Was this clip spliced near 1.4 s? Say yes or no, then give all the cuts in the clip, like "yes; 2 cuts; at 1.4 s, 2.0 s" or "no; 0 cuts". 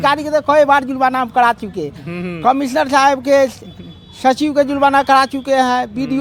no; 0 cuts